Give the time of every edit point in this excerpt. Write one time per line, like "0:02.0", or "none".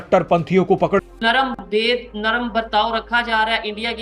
0:01.2